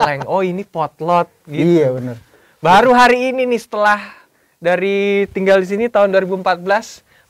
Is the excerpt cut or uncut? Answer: uncut